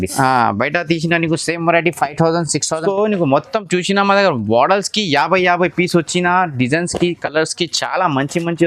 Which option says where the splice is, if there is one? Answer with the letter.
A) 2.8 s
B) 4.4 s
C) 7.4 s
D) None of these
A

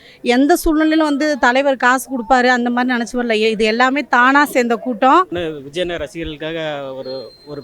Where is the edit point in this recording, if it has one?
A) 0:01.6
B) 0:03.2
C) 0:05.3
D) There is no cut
C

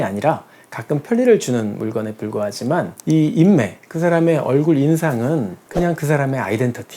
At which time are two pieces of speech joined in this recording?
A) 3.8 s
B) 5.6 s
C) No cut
B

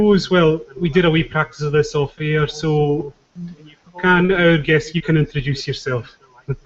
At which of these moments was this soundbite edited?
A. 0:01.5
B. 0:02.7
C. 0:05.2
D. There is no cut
D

